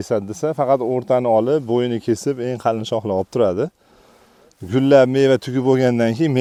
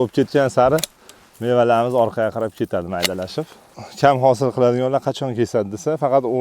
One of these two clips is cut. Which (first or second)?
second